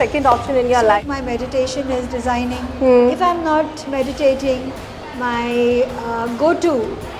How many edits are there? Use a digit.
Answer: 1